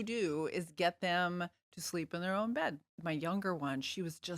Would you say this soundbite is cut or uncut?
cut